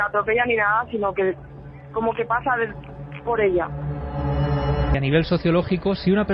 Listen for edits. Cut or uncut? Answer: cut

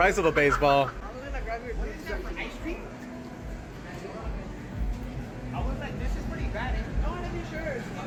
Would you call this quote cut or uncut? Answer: uncut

